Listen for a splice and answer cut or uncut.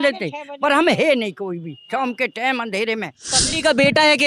cut